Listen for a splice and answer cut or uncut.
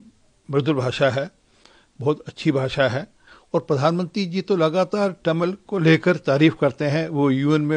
uncut